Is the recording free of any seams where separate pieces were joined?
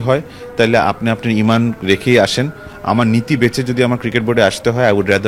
yes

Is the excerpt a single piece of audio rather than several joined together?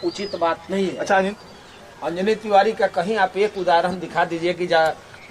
no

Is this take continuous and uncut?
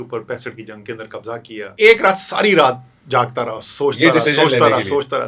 no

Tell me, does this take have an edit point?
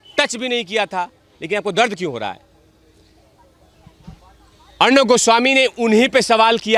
no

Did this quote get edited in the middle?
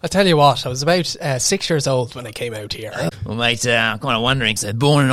yes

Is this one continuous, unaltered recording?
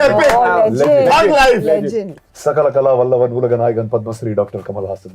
no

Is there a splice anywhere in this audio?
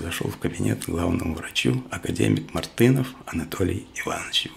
no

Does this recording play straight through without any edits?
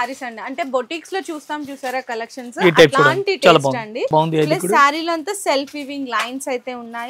no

